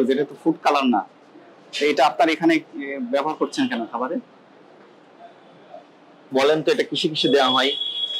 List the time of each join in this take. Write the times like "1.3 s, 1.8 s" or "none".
6.1 s